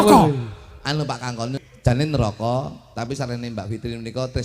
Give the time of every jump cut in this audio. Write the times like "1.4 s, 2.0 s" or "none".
2.0 s